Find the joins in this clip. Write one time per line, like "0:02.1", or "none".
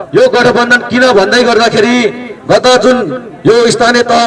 none